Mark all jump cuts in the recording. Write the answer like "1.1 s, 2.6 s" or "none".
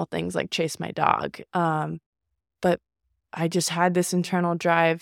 1.4 s